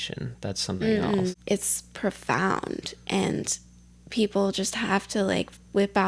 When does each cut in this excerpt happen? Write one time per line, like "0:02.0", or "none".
0:01.3